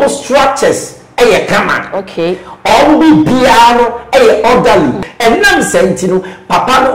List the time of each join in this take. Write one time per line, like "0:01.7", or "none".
0:05.0